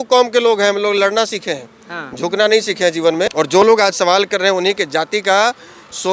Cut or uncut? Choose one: cut